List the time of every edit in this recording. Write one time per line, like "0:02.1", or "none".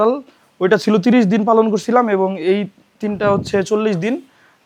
none